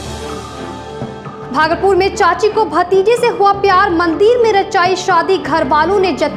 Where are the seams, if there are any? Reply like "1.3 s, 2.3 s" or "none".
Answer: none